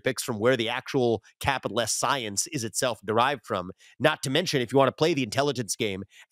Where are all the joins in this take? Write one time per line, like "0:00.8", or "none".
none